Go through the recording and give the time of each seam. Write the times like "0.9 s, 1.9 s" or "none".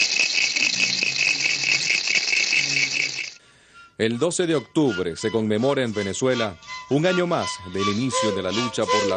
none